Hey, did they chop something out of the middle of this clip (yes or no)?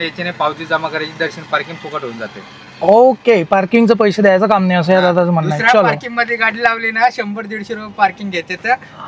no